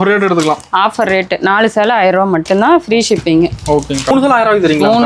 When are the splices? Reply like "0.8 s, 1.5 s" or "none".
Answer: 4.1 s